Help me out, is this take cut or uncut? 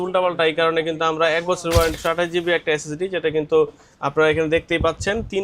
cut